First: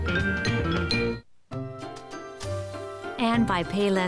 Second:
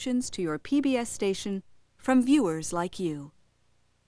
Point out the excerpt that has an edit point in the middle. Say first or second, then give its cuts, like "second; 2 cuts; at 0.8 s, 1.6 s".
first; 1 cut; at 1.3 s